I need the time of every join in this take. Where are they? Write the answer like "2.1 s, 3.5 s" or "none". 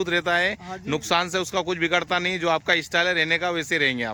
none